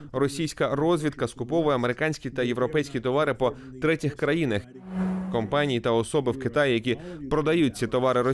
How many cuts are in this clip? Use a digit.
1